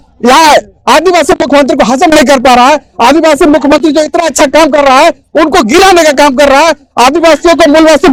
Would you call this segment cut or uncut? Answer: uncut